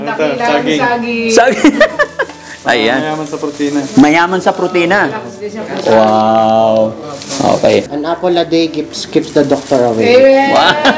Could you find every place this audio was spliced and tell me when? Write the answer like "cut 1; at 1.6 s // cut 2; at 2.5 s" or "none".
cut 1; at 7.9 s